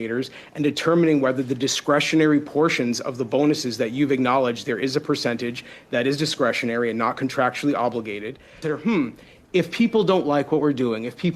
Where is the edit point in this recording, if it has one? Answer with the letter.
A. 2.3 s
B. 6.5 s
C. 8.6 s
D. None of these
C